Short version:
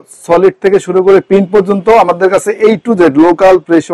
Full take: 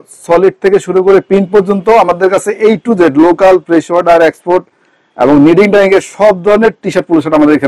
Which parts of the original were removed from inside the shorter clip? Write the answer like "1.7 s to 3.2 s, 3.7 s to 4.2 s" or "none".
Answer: none